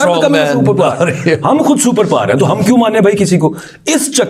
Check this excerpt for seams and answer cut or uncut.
uncut